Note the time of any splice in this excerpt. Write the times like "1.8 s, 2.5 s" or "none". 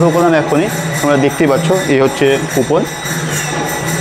none